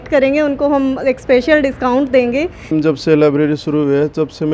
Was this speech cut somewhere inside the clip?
yes; 1 cut; at 2.7 s

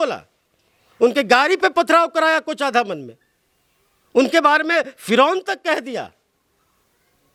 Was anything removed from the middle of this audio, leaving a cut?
no; 0 cuts

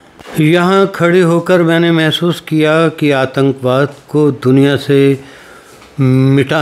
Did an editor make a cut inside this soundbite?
no; 0 cuts

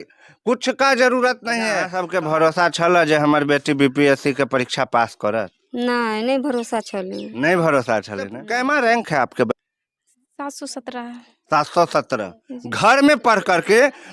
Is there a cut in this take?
yes; 3 cuts; at 1.9 s, 8.4 s, 9.5 s

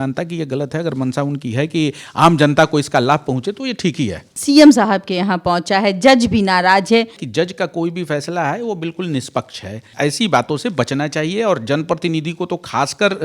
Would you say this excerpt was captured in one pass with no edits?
no; 3 cuts; at 4.3 s, 7.2 s, 9.9 s

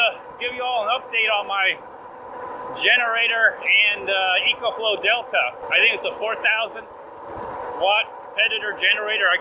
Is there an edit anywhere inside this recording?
yes; 1 cut; at 5.6 s

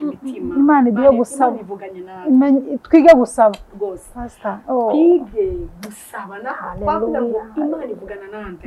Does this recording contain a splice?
no; 0 cuts

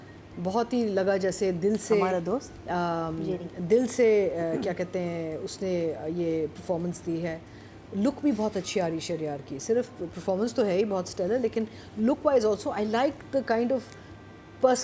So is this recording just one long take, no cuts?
yes; 0 cuts

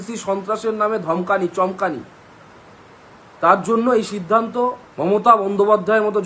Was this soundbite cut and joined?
yes; 1 cut; at 4.9 s

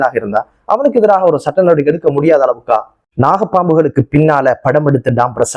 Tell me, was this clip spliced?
yes; 1 cut; at 3.0 s

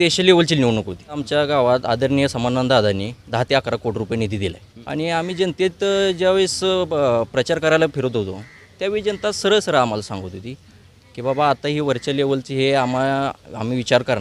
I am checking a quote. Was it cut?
yes; 2 cuts; at 1.2 s, 4.7 s

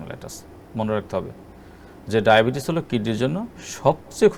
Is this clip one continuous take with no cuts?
yes; 0 cuts

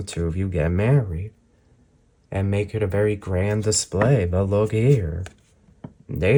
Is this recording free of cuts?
yes; 0 cuts

